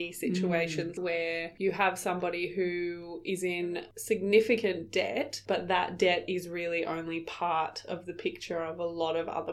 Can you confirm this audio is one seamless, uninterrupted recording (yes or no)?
no